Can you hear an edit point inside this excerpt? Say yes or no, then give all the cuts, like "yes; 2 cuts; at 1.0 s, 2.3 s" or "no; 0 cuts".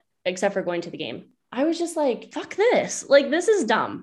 yes; 2 cuts; at 1.4 s, 2.4 s